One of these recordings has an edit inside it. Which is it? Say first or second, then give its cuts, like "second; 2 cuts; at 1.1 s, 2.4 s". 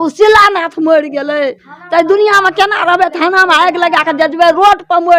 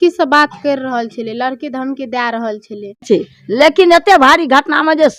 second; 1 cut; at 3.0 s